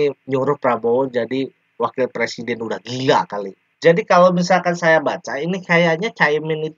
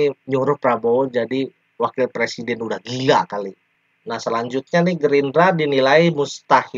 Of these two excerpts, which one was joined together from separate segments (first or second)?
first